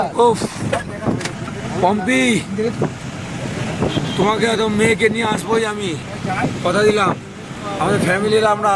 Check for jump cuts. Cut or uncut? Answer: uncut